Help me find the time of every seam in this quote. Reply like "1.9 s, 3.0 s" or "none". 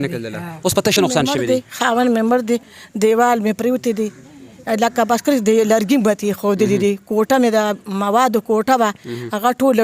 0.9 s